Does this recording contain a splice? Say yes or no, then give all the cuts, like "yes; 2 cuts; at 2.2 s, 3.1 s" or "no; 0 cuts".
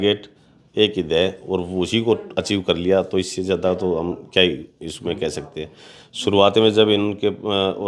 no; 0 cuts